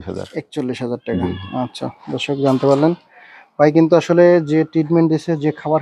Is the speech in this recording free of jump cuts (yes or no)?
yes